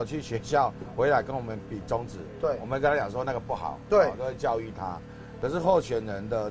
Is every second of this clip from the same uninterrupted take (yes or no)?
no